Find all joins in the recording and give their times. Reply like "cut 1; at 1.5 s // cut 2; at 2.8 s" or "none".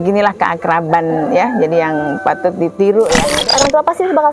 cut 1; at 3.3 s